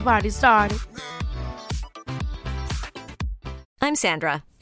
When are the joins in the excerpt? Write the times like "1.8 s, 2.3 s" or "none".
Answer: 3.6 s